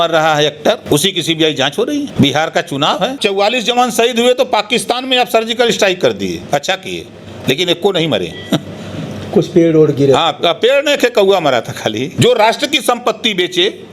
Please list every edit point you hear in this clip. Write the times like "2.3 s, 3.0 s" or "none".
0.8 s, 2.1 s, 3.2 s, 12.1 s